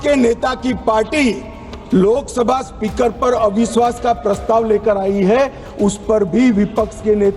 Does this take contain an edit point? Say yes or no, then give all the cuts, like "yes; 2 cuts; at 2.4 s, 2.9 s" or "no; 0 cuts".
no; 0 cuts